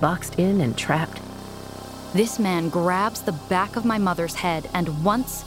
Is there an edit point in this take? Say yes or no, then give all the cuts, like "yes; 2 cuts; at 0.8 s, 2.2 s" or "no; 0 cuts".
yes; 1 cut; at 1.8 s